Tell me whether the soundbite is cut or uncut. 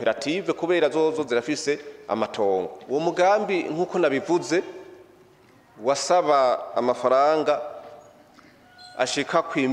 cut